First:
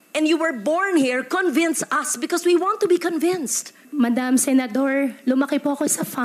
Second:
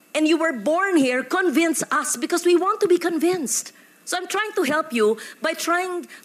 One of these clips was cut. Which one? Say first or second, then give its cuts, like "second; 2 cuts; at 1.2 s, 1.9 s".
first; 1 cut; at 3.8 s